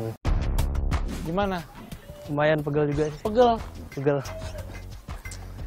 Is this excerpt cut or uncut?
cut